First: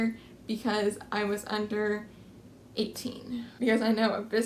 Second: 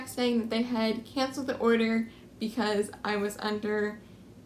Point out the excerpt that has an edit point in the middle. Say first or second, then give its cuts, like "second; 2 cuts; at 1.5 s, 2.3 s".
first; 1 cut; at 3.4 s